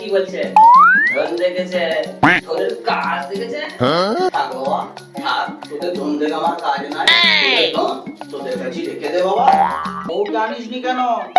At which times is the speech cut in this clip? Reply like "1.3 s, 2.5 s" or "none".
10.0 s